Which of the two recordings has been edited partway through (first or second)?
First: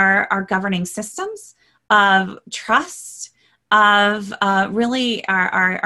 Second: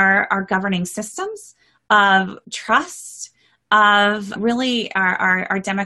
second